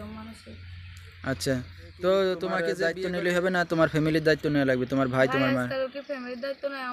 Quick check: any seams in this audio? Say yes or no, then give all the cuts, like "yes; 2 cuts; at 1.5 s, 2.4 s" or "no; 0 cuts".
yes; 1 cut; at 2.7 s